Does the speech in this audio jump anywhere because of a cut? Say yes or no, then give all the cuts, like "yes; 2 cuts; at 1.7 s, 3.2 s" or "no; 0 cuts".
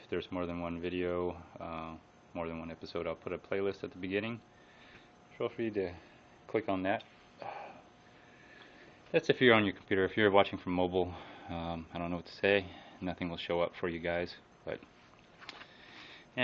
yes; 1 cut; at 5.5 s